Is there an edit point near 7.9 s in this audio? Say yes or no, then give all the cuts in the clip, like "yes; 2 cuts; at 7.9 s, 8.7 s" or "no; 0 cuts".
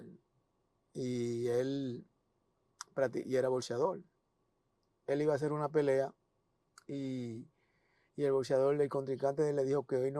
no; 0 cuts